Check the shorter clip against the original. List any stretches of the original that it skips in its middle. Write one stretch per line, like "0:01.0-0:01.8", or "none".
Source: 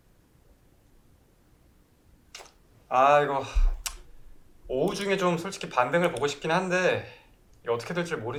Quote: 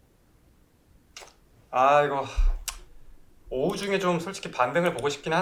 none